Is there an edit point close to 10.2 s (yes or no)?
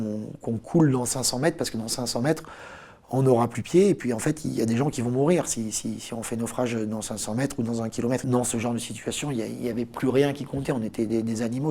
no